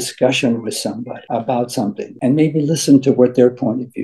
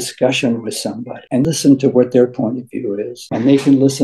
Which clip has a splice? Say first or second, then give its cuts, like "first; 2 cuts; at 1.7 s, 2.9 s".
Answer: second; 1 cut; at 1.4 s